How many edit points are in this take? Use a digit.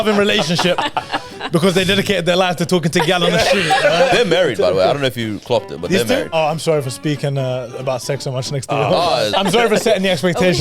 3